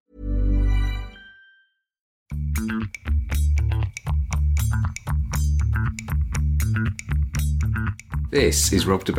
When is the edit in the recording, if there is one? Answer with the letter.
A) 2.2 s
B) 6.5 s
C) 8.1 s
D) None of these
A